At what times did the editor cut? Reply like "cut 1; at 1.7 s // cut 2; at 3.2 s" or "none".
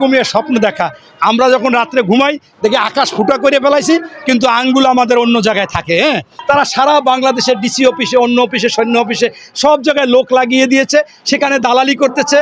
cut 1; at 6.4 s